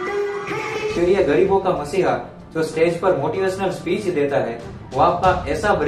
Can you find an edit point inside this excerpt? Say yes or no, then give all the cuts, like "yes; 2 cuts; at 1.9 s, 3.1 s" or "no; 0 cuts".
yes; 1 cut; at 0.9 s